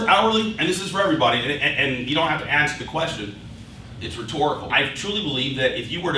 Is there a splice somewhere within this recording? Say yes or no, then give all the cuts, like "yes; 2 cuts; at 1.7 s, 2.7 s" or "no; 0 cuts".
no; 0 cuts